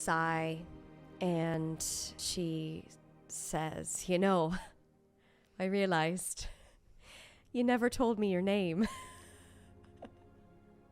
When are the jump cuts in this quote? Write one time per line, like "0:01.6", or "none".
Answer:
0:01.5